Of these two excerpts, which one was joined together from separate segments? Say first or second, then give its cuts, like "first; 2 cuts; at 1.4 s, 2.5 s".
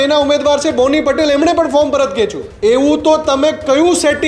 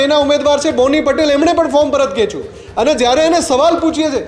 first; 1 cut; at 2.4 s